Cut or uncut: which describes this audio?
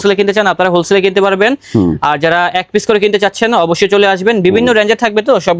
uncut